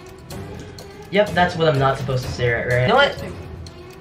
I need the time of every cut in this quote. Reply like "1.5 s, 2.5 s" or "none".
2.9 s